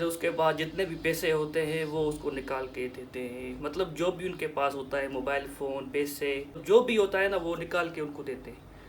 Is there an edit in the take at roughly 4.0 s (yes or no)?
no